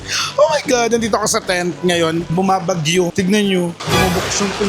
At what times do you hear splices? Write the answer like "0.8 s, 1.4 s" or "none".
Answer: 2.3 s, 3.8 s